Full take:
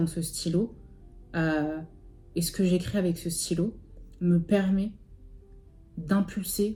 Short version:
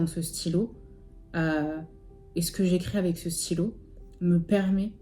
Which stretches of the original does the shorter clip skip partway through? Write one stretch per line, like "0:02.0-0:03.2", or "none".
none